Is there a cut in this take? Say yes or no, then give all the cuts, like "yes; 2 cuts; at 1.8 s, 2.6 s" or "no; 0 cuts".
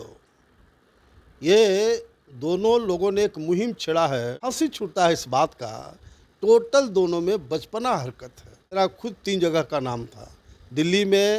yes; 2 cuts; at 4.4 s, 8.8 s